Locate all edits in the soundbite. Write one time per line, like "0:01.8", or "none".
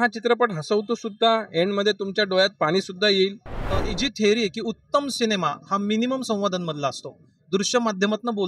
0:03.7

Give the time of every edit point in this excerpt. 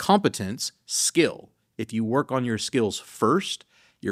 none

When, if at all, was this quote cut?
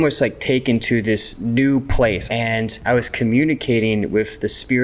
0:01.3
0:02.3

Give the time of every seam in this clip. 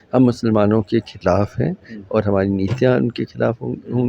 none

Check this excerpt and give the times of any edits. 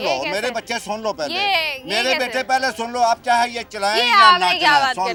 none

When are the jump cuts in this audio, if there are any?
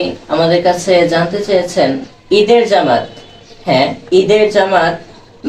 0:02.1

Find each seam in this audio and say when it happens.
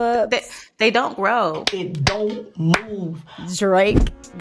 0:01.6
0:03.3

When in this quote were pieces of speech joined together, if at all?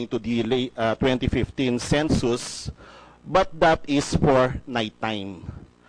none

